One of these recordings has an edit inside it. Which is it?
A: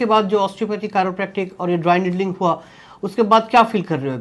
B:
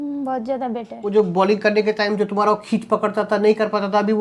B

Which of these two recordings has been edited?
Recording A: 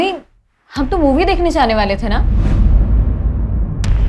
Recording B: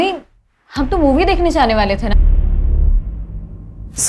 B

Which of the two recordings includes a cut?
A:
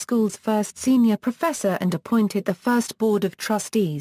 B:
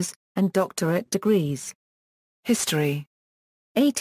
B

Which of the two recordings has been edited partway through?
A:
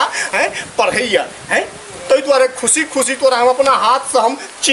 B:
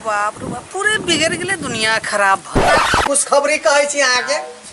B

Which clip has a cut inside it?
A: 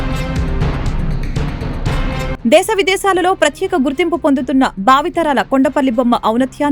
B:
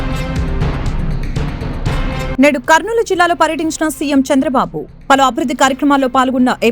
B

